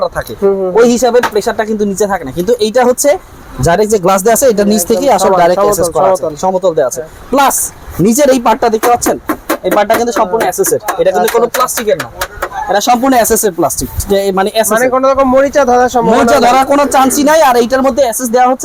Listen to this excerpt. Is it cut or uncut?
uncut